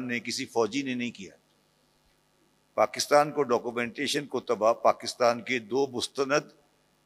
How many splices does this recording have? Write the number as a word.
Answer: zero